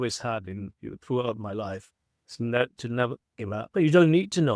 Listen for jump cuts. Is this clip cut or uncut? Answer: cut